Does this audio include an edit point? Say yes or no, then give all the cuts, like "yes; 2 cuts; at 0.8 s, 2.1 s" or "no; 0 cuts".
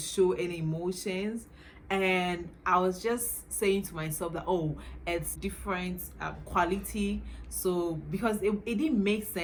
no; 0 cuts